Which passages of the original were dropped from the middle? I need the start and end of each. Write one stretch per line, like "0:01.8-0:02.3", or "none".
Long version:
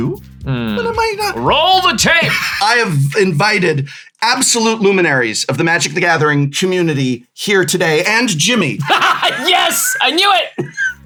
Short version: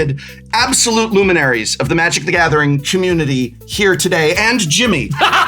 none